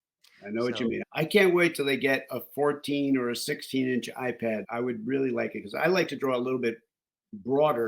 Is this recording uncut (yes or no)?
no